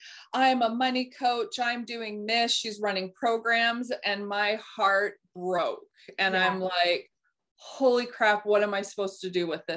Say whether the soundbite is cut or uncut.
uncut